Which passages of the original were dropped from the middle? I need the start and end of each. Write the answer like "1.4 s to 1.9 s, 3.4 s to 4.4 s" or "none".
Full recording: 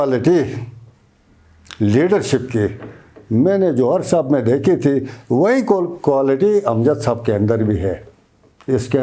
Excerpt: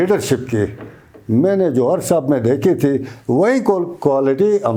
none